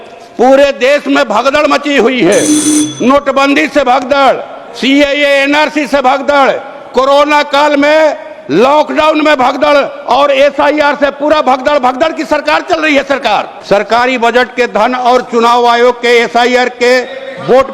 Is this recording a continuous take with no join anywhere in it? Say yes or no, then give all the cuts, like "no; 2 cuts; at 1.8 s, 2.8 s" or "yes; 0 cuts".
no; 1 cut; at 13.5 s